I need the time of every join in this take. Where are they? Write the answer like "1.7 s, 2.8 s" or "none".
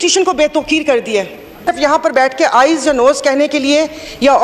1.7 s